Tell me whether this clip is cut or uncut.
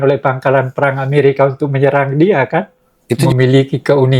cut